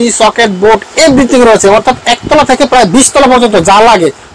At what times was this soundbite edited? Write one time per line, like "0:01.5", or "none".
none